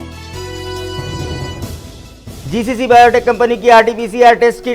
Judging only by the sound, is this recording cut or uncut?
cut